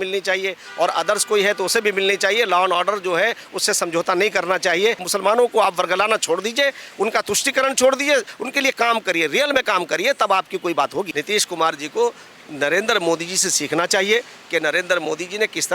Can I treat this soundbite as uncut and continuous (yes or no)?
no